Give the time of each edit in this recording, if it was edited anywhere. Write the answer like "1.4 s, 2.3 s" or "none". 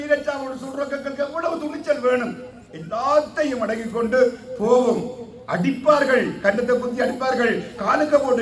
none